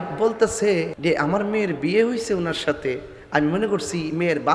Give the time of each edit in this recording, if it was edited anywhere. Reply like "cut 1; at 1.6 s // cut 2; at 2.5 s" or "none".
cut 1; at 0.9 s